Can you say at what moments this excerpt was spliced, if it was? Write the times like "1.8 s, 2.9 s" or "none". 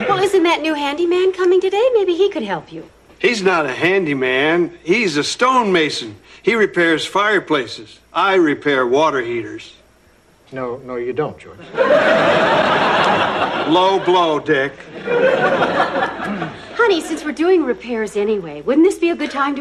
none